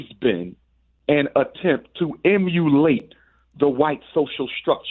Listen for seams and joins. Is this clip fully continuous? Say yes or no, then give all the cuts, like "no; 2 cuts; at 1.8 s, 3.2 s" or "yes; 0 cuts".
yes; 0 cuts